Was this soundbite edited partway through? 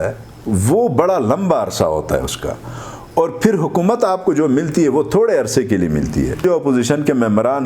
yes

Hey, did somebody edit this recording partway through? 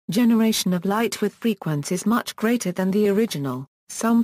yes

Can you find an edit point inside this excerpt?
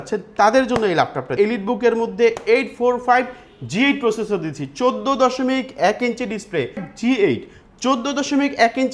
yes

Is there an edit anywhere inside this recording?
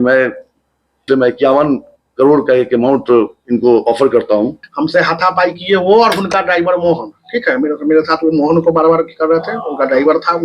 yes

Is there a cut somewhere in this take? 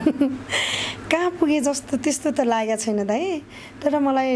no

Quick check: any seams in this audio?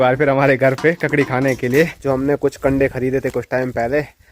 yes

